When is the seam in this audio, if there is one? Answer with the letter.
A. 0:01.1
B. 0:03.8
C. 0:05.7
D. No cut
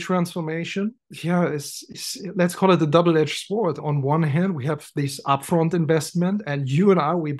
A